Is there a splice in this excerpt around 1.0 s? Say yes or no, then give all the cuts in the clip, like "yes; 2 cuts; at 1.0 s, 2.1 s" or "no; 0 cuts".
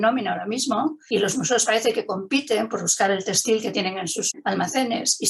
yes; 2 cuts; at 1.0 s, 4.2 s